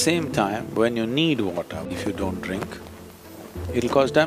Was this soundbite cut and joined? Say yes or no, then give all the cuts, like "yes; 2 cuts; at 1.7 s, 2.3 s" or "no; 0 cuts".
yes; 1 cut; at 1.9 s